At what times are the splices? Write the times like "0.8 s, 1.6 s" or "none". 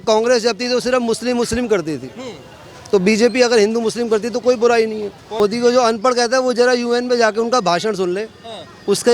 5.4 s